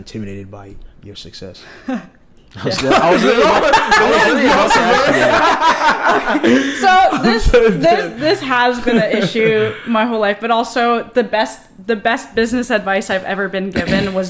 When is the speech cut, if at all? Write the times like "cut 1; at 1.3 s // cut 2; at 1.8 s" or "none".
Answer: none